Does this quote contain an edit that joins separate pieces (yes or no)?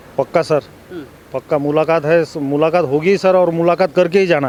no